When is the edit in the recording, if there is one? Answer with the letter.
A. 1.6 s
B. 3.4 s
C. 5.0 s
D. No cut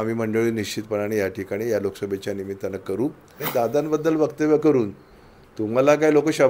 B